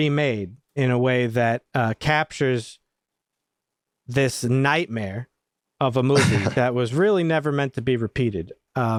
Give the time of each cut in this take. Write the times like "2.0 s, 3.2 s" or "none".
none